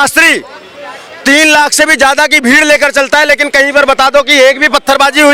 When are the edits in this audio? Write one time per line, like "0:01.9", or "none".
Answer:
none